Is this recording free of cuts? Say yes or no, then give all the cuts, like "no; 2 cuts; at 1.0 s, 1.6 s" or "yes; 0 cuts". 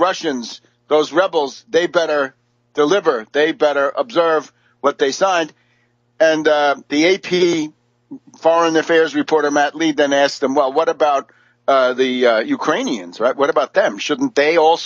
no; 1 cut; at 7.2 s